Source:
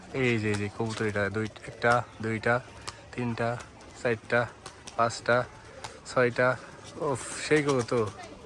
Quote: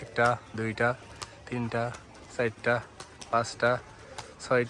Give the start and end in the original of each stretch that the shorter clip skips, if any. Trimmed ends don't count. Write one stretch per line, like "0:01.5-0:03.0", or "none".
none